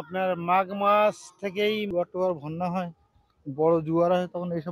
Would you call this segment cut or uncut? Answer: cut